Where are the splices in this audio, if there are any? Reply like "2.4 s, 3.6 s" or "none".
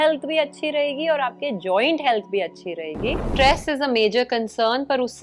3.2 s